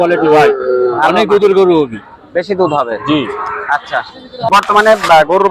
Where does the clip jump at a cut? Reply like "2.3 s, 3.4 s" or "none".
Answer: 4.5 s